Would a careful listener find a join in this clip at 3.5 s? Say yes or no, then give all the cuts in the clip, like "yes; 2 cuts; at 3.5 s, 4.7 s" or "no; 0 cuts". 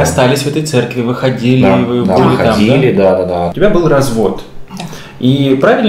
yes; 1 cut; at 3.5 s